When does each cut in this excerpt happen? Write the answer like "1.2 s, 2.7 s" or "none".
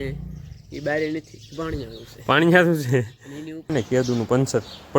3.7 s